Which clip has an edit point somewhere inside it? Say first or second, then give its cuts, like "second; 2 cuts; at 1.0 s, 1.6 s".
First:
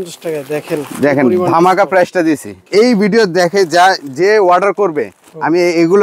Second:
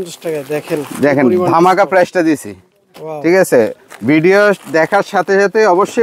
first; 1 cut; at 2.6 s